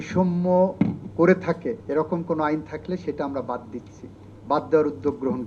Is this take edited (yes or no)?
yes